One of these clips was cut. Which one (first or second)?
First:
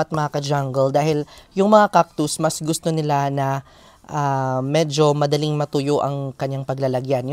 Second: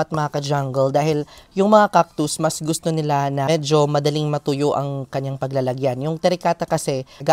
second